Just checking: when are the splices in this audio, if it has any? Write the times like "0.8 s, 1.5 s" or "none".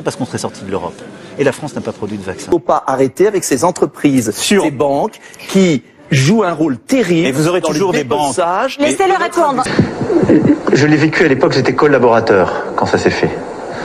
2.5 s, 9.7 s